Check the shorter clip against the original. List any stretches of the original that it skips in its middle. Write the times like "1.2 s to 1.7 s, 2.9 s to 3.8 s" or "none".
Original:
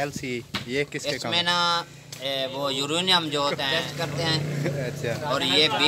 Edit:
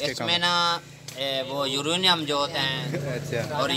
3.7 s to 4.4 s